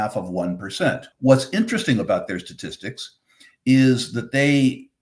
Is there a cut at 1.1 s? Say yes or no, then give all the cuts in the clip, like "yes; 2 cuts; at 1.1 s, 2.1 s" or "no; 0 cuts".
yes; 1 cut; at 1.1 s